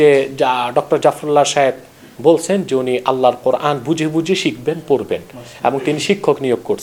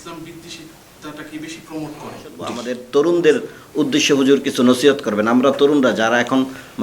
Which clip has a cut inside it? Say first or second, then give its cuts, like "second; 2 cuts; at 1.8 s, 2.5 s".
second; 1 cut; at 2.6 s